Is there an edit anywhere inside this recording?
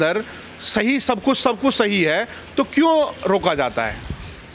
no; 0 cuts

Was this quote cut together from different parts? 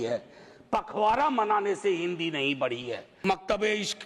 yes; 1 cut; at 3.1 s

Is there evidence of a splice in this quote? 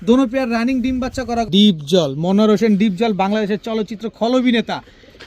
yes; 1 cut; at 1.5 s

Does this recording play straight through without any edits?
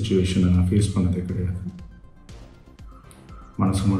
no; 2 cuts; at 2.0 s, 3.2 s

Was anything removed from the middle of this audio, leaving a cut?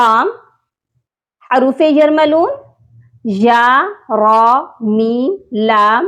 no; 0 cuts

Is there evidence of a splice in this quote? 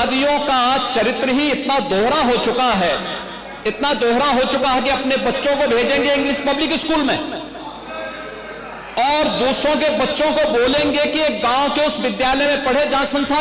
no; 0 cuts

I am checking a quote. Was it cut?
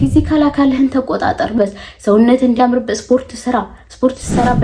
yes; 1 cut; at 1.6 s

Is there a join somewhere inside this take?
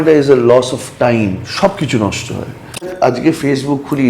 yes; 2 cuts; at 1.5 s, 2.9 s

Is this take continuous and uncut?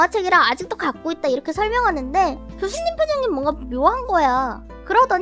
yes; 0 cuts

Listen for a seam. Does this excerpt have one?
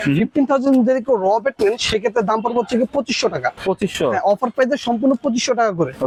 no; 0 cuts

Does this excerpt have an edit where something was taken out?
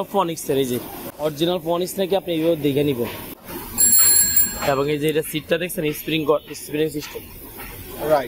yes; 2 cuts; at 1.1 s, 3.3 s

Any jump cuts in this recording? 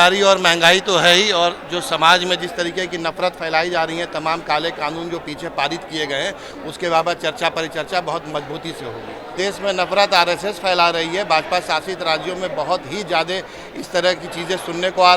yes; 1 cut; at 9.3 s

